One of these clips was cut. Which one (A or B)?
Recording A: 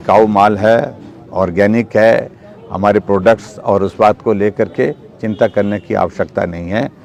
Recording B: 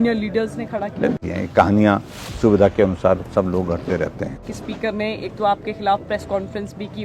B